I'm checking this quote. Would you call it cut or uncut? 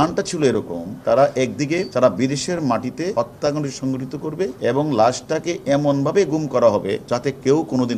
cut